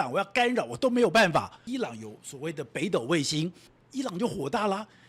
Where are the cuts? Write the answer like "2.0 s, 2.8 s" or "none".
1.6 s, 3.8 s